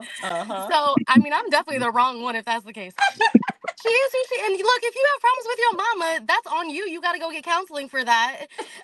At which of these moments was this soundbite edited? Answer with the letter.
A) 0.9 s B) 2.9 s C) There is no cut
B